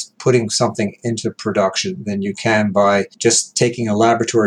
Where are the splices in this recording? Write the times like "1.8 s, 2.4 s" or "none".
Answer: 3.1 s